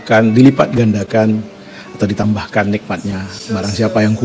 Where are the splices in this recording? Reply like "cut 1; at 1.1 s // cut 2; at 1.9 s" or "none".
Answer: none